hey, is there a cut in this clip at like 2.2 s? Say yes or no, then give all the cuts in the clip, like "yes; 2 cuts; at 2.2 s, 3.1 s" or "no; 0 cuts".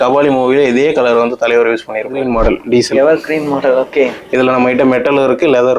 yes; 1 cut; at 2.2 s